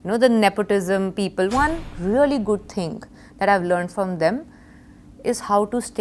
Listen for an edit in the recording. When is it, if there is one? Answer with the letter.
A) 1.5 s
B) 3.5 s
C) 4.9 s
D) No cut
A